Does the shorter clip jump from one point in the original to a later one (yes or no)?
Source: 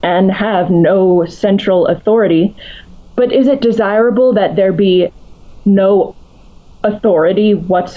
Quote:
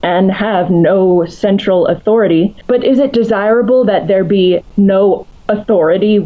yes